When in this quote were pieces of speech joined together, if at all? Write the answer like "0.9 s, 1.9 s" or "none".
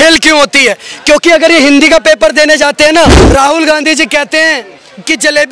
3.2 s